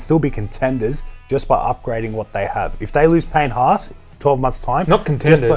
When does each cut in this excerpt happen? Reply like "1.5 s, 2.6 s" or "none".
none